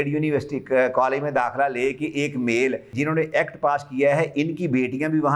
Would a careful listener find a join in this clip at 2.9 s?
yes; 1 cut; at 2.9 s

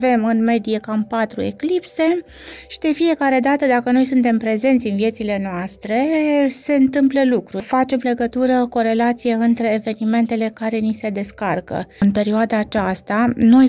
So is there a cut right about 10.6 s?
no; 2 cuts; at 7.6 s, 12.0 s

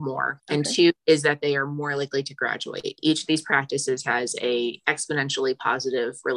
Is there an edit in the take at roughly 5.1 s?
no; 1 cut; at 1.0 s

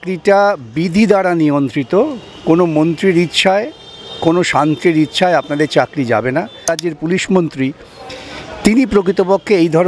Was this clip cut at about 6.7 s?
yes; 1 cut; at 6.7 s

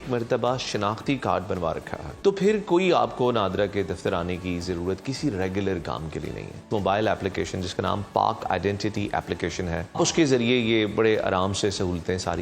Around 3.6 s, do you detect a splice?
no; 3 cuts; at 2.1 s, 6.6 s, 10.0 s

